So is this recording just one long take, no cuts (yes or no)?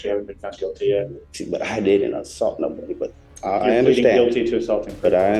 no